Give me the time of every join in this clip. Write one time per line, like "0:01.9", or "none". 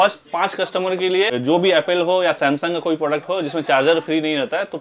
0:01.4